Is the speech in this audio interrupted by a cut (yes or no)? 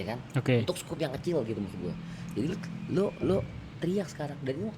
no